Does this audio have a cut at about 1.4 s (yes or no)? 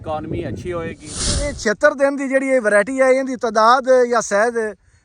yes